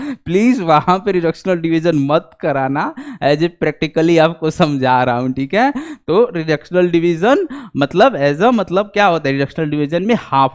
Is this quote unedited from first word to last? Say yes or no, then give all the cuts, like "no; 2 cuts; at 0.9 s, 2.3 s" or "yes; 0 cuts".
yes; 0 cuts